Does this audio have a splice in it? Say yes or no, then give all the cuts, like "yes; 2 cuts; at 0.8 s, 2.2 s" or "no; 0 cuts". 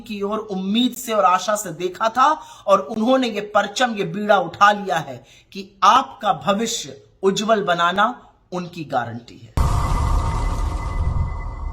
yes; 1 cut; at 9.5 s